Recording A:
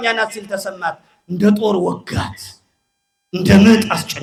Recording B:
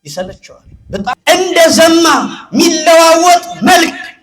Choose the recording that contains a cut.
B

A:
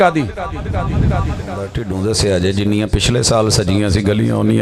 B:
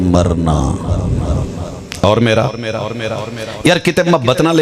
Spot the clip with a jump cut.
A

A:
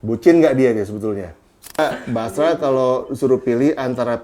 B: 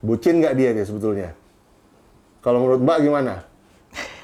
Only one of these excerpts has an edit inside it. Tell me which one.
A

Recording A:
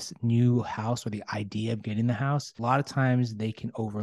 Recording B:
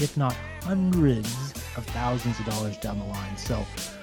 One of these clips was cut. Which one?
A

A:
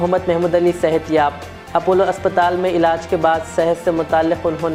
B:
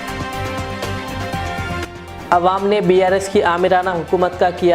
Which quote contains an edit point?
B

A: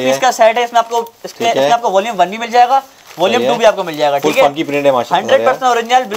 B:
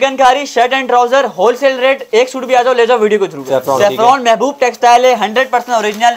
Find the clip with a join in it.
B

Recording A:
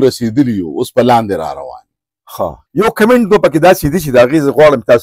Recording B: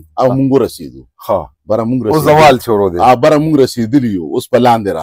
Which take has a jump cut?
A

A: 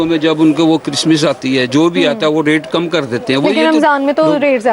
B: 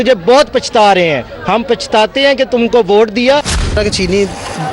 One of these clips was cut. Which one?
B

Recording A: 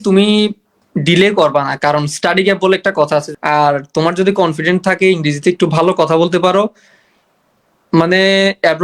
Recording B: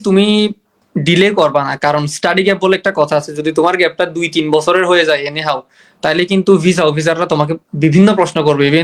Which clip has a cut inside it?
A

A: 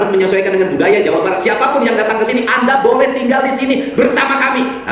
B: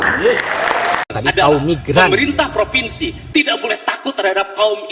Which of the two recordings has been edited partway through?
B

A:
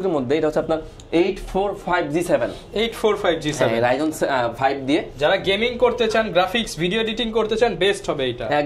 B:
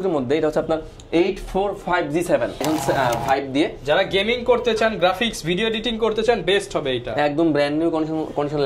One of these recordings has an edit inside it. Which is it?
B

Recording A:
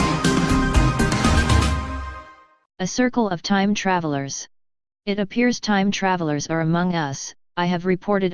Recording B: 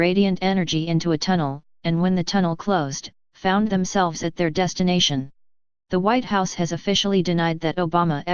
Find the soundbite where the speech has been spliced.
A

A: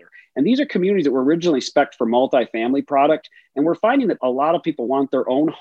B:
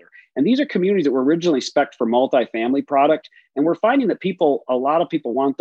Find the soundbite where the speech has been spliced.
A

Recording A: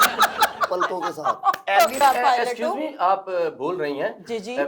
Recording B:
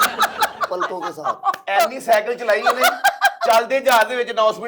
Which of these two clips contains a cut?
A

